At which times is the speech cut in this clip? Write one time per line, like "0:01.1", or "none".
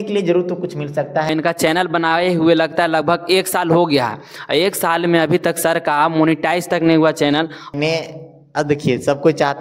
0:01.3
0:07.7